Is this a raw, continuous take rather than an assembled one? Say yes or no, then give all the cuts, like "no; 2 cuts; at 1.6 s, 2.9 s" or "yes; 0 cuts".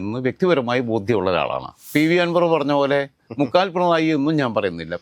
no; 1 cut; at 1.9 s